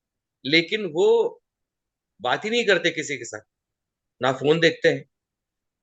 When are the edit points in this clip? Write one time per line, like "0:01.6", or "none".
none